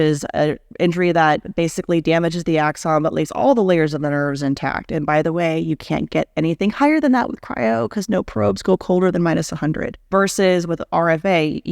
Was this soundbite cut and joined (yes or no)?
yes